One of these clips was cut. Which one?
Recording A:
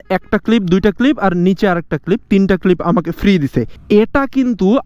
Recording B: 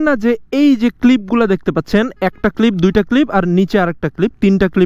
A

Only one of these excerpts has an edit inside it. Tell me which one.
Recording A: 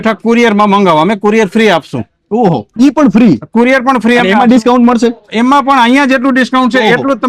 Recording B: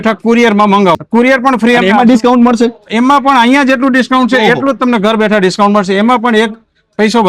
B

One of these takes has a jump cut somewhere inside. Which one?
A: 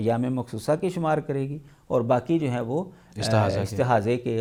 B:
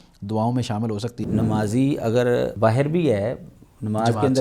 B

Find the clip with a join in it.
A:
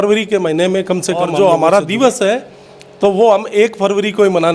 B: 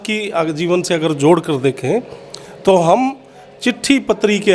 A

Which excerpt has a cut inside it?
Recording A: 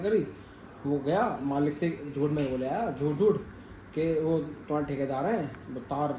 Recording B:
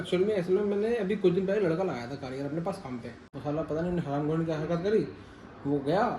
B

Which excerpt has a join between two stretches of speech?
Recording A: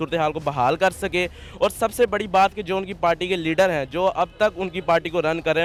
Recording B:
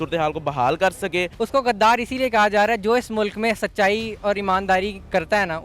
B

